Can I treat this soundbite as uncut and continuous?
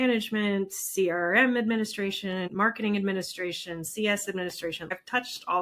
no; 2 cuts; at 2.5 s, 4.9 s

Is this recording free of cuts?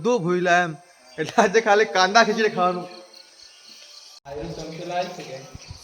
no; 1 cut; at 4.2 s

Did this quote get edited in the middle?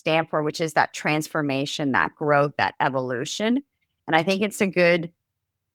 no; 0 cuts

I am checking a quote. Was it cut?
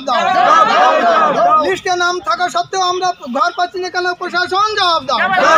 no; 0 cuts

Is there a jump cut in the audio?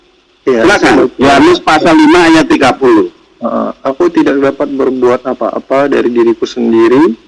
no; 0 cuts

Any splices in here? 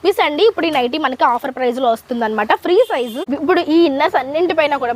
yes; 1 cut; at 3.2 s

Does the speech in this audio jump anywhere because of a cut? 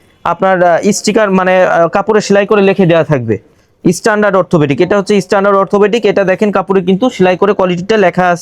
no; 0 cuts

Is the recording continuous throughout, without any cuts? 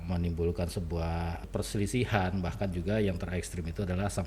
no; 1 cut; at 1.5 s

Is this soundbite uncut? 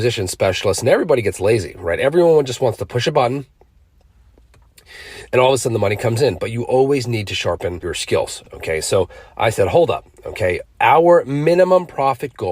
no; 1 cut; at 8.4 s

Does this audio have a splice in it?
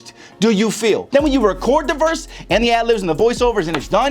yes; 1 cut; at 1.0 s

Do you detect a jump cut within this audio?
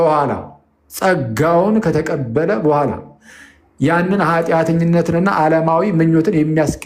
no; 0 cuts

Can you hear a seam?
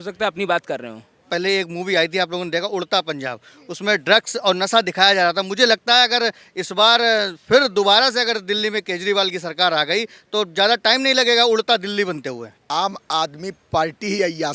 yes; 2 cuts; at 1.3 s, 12.5 s

